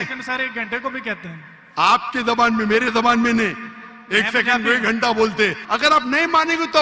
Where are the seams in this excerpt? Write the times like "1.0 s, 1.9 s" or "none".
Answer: 5.6 s

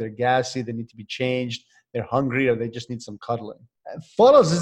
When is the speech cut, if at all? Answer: 3.7 s

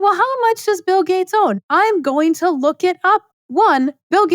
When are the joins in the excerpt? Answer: 3.3 s

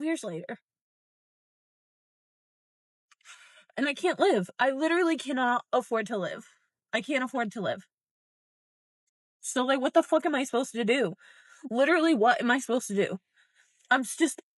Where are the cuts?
none

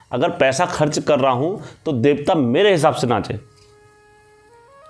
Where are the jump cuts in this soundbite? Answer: none

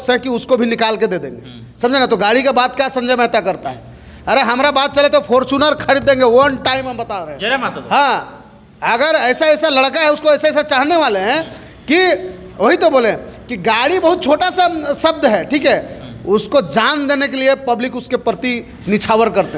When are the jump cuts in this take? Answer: none

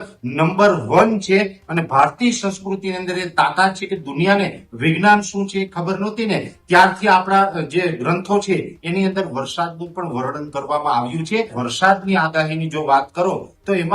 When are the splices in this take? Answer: 11.6 s

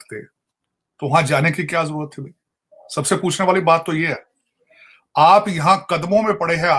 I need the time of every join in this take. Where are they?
none

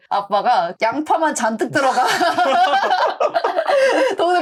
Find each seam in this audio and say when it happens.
none

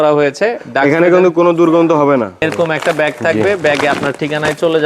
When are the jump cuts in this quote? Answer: 2.4 s

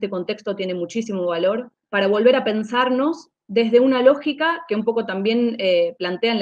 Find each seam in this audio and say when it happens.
1.8 s

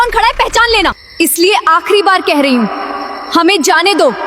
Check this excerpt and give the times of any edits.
1.0 s

